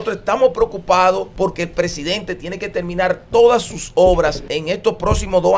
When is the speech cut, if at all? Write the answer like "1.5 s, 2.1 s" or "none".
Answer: 1.3 s, 4.5 s